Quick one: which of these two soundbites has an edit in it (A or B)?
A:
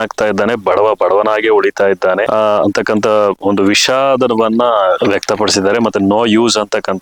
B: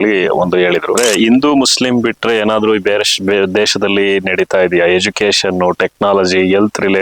B